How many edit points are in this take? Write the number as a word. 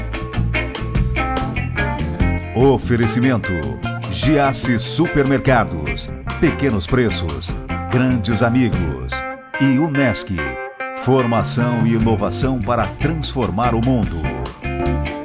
zero